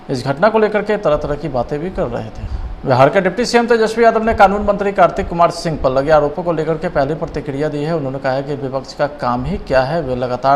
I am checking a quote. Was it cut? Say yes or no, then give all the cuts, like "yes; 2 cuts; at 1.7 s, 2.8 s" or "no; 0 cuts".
yes; 1 cut; at 2.6 s